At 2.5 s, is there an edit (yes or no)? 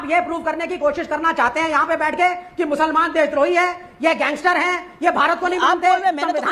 no